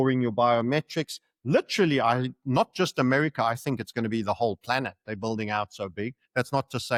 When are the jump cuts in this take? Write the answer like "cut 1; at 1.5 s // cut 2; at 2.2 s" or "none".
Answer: none